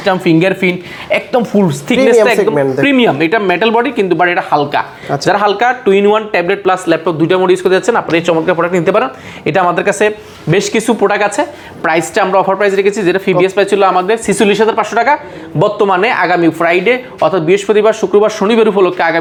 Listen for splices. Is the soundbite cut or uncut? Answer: uncut